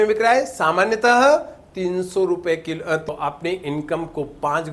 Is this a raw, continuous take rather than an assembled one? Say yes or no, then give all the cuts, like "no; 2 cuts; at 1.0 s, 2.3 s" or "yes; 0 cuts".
no; 1 cut; at 3.0 s